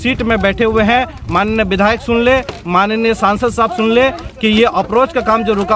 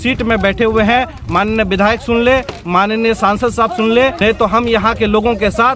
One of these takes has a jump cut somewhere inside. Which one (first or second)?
second